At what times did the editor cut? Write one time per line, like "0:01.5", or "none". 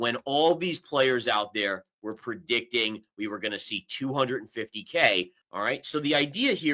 0:05.4